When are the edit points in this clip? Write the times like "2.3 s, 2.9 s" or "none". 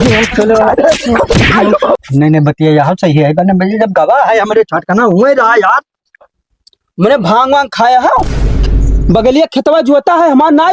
2.0 s